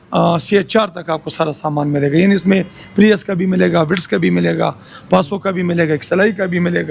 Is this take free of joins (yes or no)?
yes